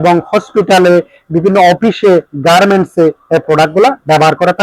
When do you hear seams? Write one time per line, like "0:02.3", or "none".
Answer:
none